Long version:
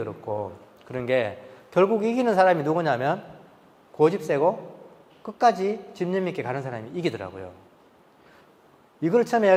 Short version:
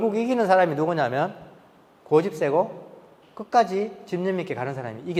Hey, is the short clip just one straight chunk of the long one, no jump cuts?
yes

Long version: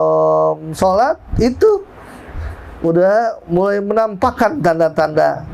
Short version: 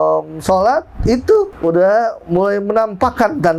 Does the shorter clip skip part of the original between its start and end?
yes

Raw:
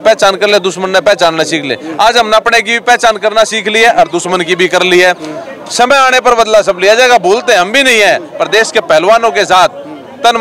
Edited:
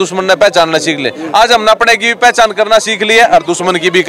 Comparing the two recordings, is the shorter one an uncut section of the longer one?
yes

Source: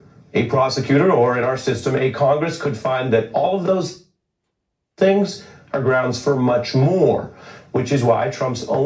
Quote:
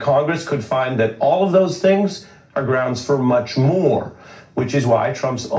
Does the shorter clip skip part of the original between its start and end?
yes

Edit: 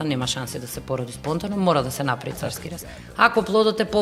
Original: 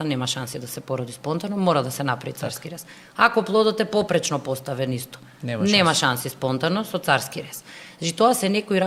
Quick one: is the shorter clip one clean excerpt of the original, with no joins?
yes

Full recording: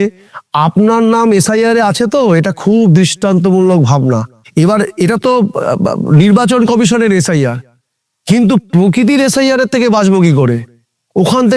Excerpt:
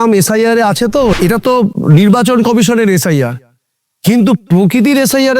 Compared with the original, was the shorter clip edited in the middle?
yes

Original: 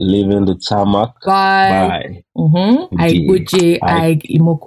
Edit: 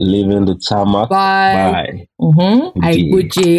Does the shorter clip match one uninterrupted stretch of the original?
no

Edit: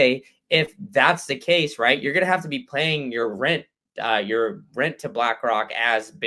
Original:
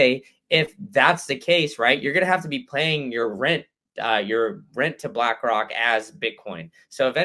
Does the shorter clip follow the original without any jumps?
yes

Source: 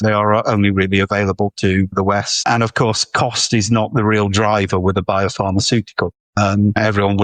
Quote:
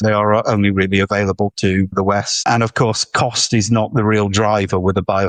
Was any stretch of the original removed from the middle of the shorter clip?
no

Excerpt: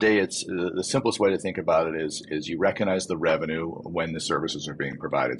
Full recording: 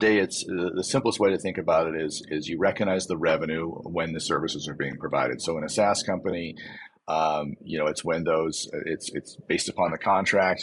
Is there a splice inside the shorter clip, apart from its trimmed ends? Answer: no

